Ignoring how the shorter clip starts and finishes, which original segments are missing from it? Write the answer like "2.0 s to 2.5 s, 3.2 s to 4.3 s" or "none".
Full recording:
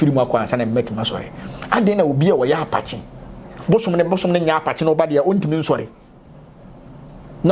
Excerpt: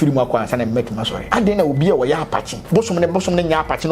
1.1 s to 1.5 s, 3.0 s to 3.5 s